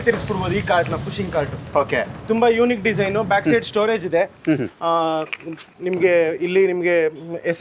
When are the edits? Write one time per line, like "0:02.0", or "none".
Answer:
none